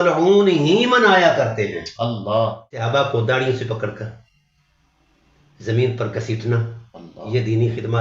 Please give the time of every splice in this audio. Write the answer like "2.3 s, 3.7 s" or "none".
2.9 s